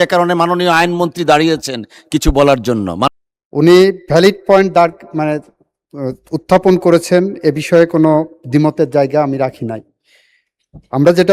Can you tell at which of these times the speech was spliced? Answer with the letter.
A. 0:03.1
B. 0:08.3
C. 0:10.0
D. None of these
A